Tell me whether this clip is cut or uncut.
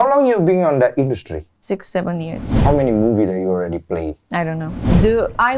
cut